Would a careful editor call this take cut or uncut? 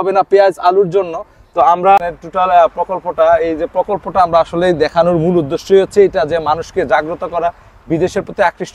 cut